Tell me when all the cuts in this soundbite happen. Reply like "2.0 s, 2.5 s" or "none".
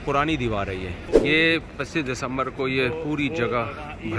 1.0 s